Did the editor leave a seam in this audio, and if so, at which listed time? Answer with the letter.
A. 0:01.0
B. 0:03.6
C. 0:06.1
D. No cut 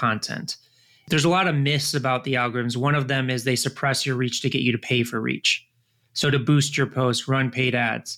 A